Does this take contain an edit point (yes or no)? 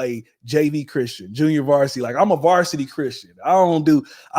no